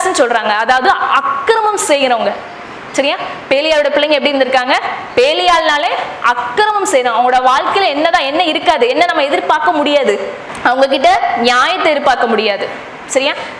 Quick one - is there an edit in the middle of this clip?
no; 0 cuts

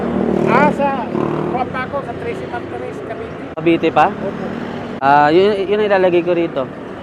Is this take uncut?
no; 2 cuts; at 3.5 s, 4.8 s

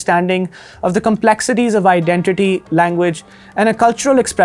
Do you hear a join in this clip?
no; 0 cuts

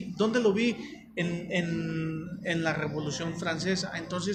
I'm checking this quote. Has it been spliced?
no; 0 cuts

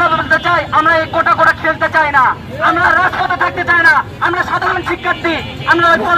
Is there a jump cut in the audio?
no; 0 cuts

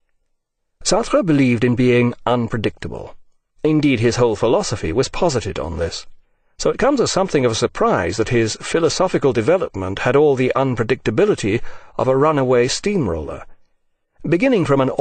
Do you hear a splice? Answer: no; 0 cuts

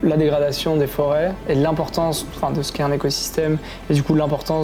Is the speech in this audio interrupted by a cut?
no; 0 cuts

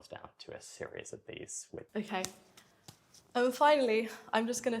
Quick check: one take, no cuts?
no; 1 cut; at 1.9 s

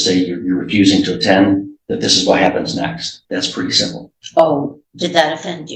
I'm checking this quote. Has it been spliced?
yes; 1 cut; at 3.1 s

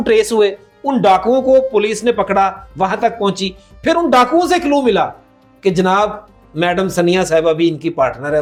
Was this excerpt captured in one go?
yes; 0 cuts

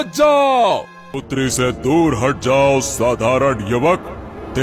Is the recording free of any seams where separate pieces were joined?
no; 1 cut; at 1.2 s

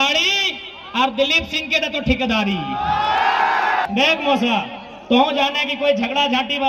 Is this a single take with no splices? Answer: no; 1 cut; at 3.8 s

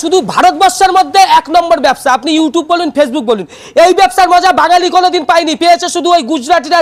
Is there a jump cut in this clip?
no; 0 cuts

